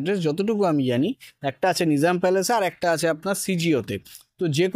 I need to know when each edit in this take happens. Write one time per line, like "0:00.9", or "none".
none

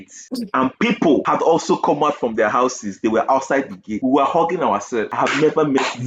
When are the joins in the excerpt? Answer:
0:01.2
0:03.8
0:05.1

